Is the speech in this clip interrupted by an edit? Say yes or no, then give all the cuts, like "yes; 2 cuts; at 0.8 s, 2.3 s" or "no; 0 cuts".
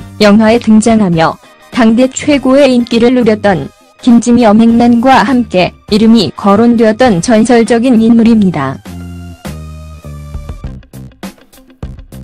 no; 0 cuts